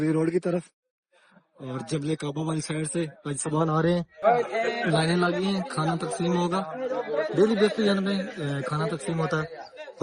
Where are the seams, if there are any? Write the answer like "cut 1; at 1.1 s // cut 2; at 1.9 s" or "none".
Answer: cut 1; at 4.2 s

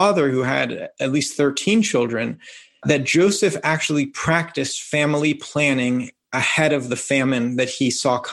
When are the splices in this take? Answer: cut 1; at 2.8 s

